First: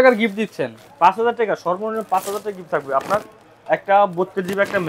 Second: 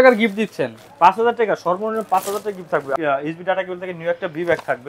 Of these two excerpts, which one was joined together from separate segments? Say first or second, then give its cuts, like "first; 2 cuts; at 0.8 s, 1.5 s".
second; 1 cut; at 3.0 s